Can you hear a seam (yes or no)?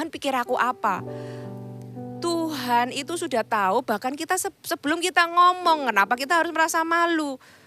no